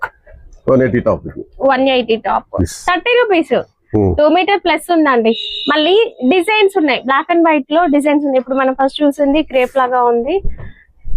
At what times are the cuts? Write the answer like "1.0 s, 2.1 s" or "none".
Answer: 2.6 s